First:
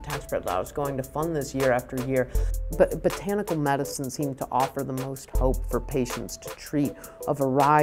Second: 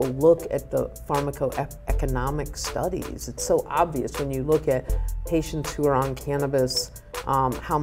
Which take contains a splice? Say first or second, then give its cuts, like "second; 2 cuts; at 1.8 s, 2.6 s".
first; 1 cut; at 2.6 s